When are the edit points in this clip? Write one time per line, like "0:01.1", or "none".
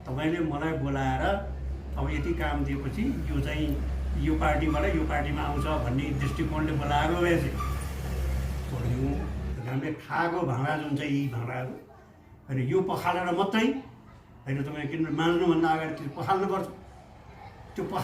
0:09.5